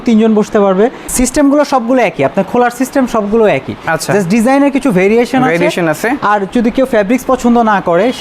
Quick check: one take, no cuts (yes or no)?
no